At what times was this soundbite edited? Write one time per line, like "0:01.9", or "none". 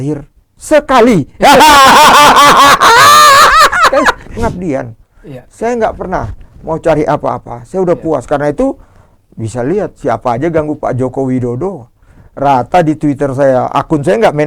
0:04.3